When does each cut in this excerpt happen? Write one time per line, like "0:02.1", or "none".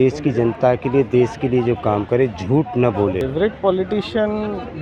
0:03.2